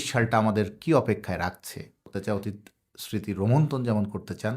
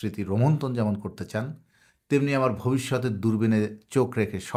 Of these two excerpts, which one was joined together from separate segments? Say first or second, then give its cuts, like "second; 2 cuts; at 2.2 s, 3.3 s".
first; 1 cut; at 2.0 s